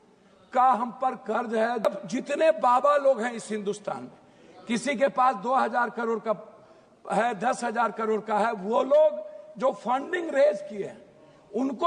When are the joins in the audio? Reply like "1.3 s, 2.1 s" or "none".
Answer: 1.8 s